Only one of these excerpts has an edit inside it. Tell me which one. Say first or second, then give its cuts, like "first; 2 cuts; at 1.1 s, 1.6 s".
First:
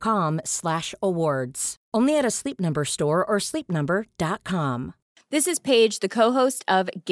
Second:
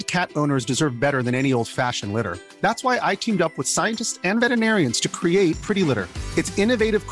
first; 1 cut; at 5.1 s